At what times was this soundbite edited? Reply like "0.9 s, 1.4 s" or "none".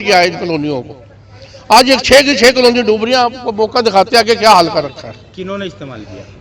none